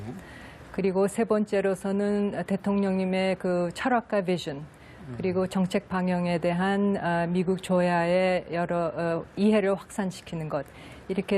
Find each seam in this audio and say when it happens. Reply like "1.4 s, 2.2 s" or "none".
6.6 s